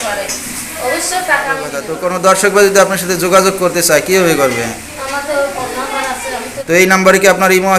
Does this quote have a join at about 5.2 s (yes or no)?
no